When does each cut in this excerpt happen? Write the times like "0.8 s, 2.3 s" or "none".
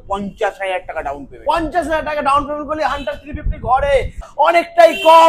4.2 s